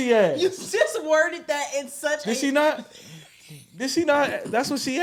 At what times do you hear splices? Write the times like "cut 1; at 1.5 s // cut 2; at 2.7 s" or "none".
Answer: none